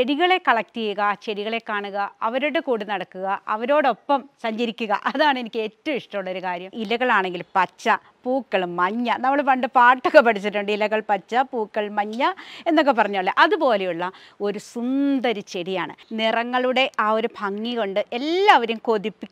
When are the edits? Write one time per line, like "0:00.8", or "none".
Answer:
0:06.8
0:16.0